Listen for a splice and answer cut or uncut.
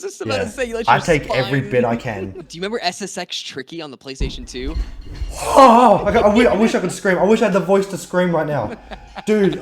cut